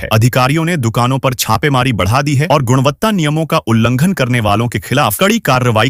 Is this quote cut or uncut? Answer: uncut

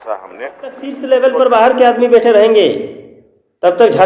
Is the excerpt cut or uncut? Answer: cut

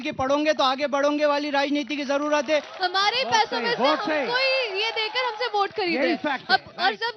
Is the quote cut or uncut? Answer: cut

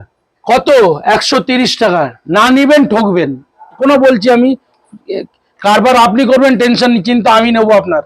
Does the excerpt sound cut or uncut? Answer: cut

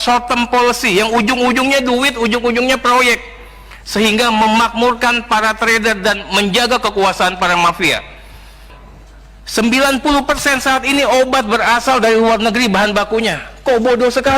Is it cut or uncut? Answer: cut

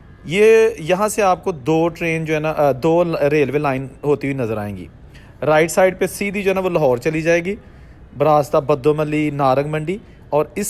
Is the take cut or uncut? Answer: uncut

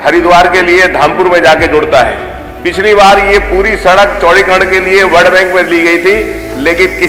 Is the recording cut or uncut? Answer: uncut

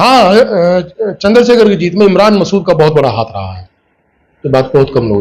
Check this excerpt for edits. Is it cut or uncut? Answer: uncut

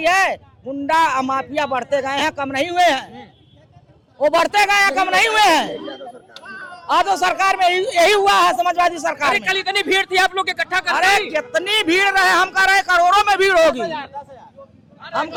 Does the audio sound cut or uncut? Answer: uncut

